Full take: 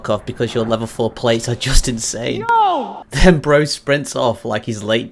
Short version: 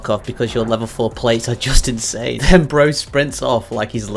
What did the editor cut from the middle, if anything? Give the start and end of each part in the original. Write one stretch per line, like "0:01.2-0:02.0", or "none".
0:02.3-0:03.1